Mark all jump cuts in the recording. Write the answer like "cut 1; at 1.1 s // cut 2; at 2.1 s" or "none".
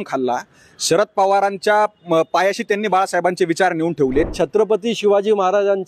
cut 1; at 4.3 s

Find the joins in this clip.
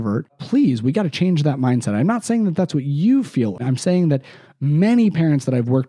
cut 1; at 3.6 s

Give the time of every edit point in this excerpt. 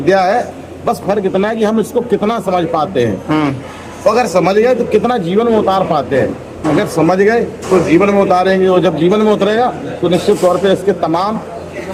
none

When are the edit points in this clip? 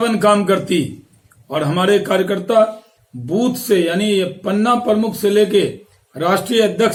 none

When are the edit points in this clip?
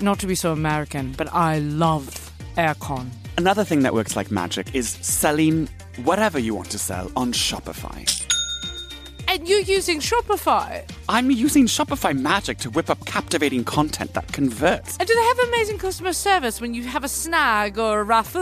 cut 1; at 3.2 s // cut 2; at 9.1 s // cut 3; at 14.9 s

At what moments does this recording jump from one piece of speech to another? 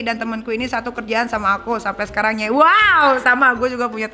none

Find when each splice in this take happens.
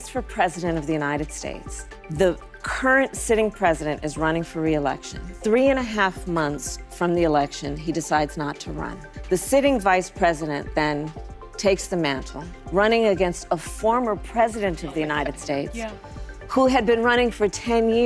none

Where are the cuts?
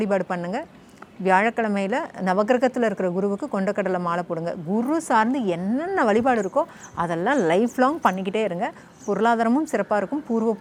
none

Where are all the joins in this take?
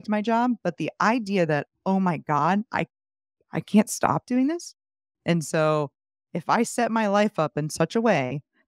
cut 1; at 5.1 s

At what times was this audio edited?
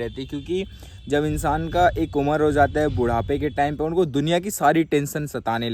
none

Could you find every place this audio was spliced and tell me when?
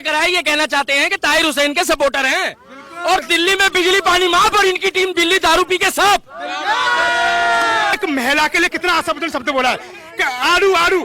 cut 1; at 8.0 s

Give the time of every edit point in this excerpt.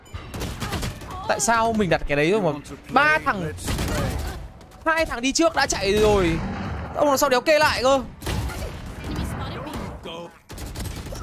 none

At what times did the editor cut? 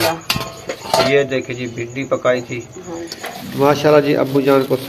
cut 1; at 3.5 s

